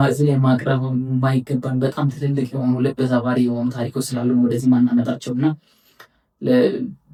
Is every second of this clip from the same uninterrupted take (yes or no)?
yes